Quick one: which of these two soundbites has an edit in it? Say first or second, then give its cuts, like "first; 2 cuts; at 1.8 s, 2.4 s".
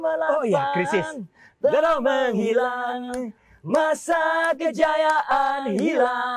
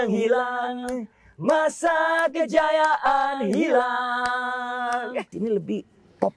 second; 1 cut; at 5.3 s